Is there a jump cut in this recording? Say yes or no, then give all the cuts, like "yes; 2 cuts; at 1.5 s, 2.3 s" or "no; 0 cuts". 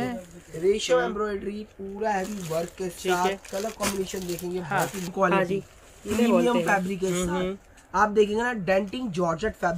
yes; 1 cut; at 5.1 s